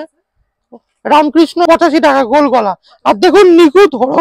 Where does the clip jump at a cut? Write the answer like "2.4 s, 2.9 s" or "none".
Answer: 1.6 s